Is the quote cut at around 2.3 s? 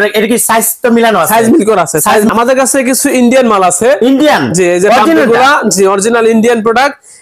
yes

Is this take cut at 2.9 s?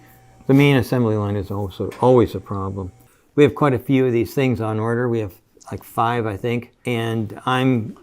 yes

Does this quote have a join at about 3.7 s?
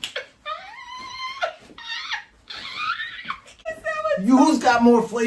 yes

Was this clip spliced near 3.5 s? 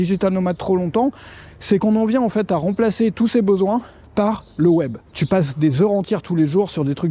no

